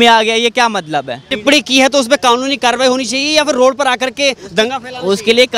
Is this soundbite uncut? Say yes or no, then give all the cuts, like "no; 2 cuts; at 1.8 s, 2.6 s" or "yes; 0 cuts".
no; 1 cut; at 1.2 s